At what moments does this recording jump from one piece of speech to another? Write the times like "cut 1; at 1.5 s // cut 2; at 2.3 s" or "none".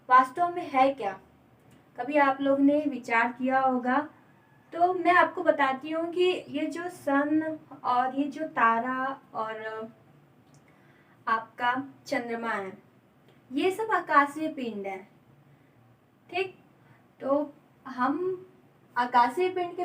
none